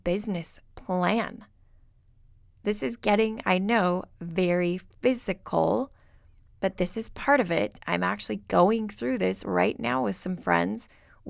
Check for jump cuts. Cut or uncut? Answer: uncut